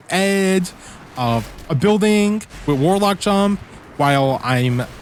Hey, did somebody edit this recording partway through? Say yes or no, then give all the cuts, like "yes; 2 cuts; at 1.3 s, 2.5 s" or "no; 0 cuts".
no; 0 cuts